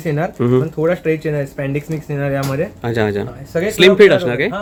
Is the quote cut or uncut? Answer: uncut